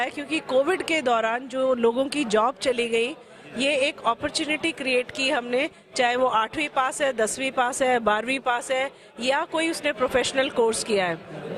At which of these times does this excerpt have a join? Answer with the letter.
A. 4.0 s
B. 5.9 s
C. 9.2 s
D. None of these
D